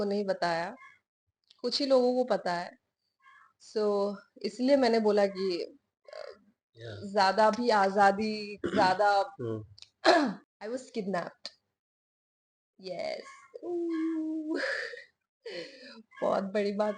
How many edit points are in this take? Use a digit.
1